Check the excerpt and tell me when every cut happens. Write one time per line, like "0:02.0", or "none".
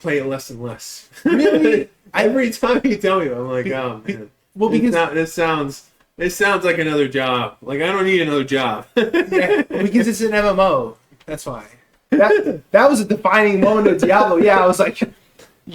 0:11.9